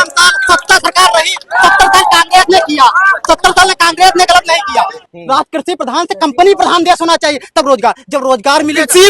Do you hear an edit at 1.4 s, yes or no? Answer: no